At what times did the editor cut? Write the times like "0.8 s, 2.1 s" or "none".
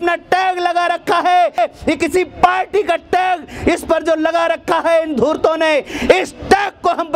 1.6 s